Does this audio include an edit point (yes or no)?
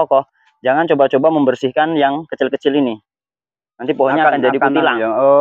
no